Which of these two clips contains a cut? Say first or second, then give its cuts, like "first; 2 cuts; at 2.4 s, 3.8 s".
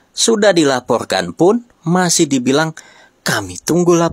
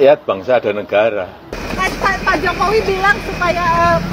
second; 1 cut; at 1.6 s